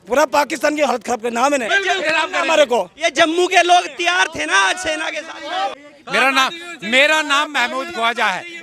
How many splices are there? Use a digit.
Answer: 1